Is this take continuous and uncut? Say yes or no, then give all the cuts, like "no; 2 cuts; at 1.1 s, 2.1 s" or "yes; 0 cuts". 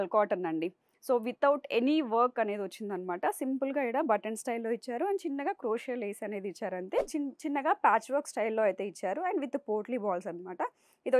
no; 1 cut; at 7.1 s